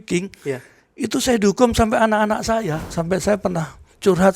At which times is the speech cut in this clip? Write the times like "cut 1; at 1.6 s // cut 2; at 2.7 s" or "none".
cut 1; at 2.9 s